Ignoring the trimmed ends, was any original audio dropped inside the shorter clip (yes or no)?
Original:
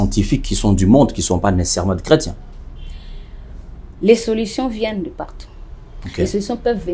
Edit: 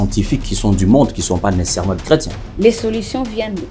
yes